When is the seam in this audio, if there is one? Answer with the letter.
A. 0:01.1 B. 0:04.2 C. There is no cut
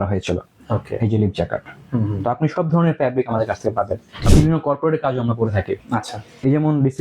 B